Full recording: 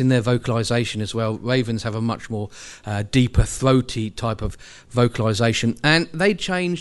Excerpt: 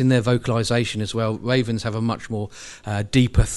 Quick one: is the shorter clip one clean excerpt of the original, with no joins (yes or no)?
yes